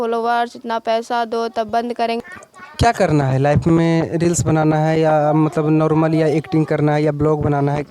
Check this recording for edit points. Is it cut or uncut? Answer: cut